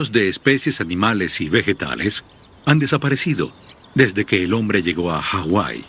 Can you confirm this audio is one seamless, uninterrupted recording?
no; 1 cut; at 3.2 s

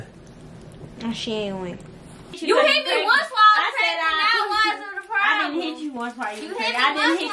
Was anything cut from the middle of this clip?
yes; 1 cut; at 2.4 s

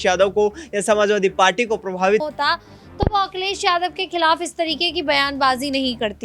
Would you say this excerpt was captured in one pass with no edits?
no; 1 cut; at 2.2 s

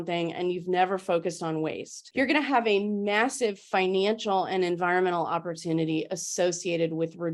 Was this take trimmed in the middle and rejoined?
no; 0 cuts

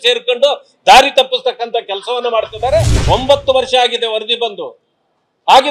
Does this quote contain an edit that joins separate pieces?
yes; 1 cut; at 2.9 s

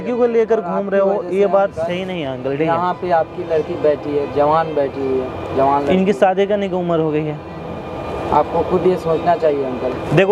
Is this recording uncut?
yes; 0 cuts

